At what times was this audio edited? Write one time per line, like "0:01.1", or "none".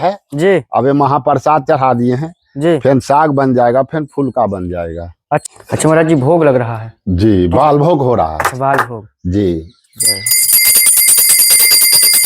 0:05.4